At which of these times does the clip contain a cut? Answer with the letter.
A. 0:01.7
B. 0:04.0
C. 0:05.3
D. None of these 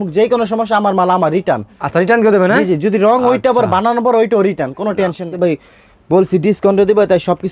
C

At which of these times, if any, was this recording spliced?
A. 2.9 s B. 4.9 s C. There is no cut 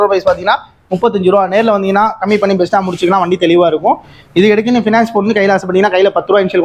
C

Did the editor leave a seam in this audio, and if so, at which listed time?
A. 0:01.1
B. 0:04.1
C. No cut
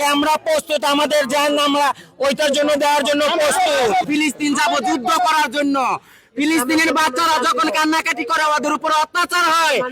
B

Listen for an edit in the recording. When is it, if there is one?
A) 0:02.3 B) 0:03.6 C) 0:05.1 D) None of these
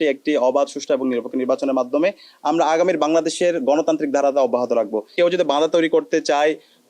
C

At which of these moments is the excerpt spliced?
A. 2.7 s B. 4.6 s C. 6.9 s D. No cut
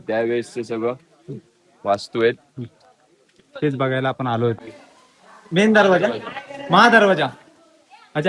B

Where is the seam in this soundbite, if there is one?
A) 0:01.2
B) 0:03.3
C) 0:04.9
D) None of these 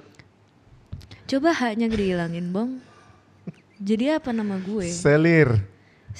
D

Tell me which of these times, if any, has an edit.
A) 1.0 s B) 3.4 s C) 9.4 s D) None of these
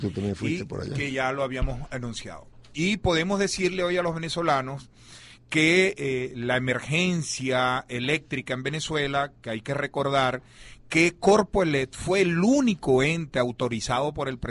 D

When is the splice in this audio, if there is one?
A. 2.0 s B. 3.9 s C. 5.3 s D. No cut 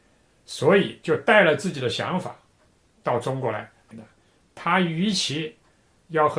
B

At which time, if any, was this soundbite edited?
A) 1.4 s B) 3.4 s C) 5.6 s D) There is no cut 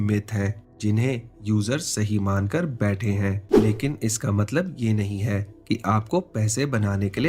B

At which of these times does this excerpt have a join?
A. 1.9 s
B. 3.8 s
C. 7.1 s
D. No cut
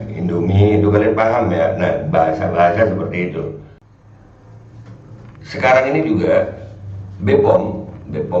B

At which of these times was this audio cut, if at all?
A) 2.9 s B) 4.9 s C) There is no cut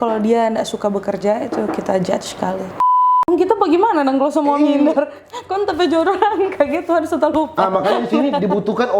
A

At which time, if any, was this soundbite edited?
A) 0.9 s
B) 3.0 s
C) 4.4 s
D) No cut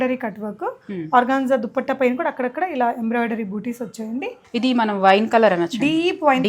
C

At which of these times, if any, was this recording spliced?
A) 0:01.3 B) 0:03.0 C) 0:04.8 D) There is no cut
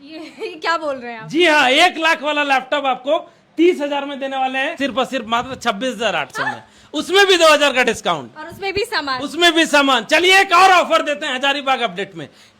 C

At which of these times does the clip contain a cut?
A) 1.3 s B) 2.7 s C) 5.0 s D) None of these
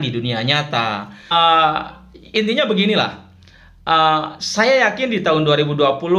A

